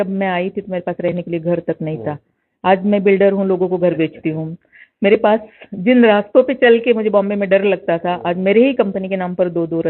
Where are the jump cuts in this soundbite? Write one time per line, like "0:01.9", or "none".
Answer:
none